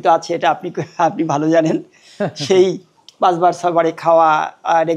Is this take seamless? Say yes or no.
yes